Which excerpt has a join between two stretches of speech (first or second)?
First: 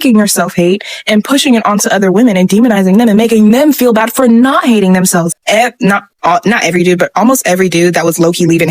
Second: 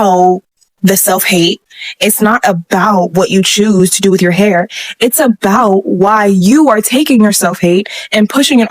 first